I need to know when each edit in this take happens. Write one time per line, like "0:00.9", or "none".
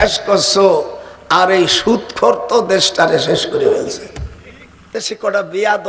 0:04.9